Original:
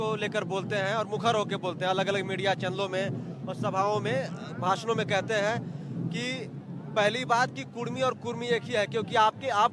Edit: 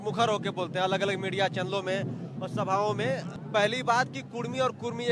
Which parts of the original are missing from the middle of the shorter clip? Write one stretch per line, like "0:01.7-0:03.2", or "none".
0:04.4-0:06.8